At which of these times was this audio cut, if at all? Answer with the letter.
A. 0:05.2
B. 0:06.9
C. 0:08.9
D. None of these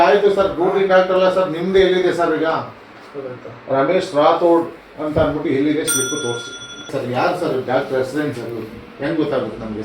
B